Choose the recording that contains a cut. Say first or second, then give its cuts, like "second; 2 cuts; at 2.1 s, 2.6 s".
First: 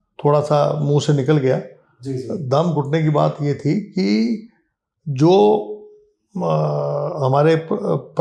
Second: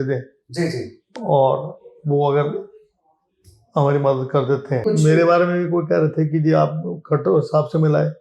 second; 1 cut; at 4.8 s